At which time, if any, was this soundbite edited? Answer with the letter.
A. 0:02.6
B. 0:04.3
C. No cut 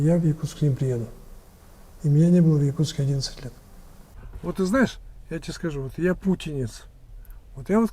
B